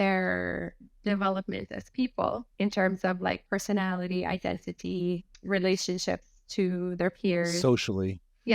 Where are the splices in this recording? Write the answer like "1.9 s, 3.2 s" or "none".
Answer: 2.5 s, 5.3 s